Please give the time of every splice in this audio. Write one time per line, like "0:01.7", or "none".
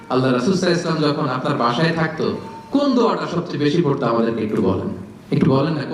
none